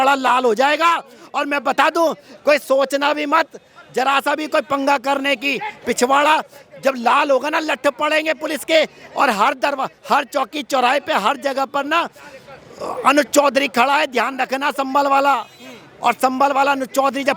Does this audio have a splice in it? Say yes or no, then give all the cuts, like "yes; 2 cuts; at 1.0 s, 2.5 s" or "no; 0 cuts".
no; 0 cuts